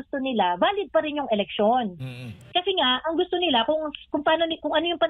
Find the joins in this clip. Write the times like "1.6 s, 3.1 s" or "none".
none